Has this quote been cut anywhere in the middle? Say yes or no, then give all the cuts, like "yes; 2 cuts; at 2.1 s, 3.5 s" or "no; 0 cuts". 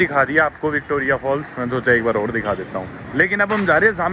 yes; 1 cut; at 3.0 s